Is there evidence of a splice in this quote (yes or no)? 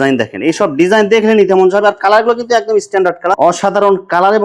yes